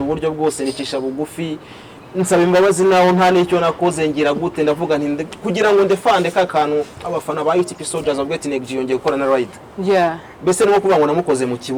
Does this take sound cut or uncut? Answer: uncut